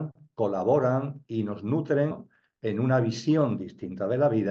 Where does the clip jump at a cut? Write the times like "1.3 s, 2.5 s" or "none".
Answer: 2.3 s